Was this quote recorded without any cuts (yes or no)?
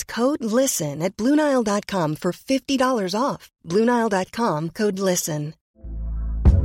no